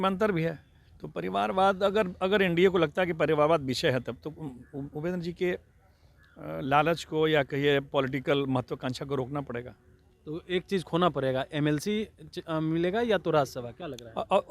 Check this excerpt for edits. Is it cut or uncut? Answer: uncut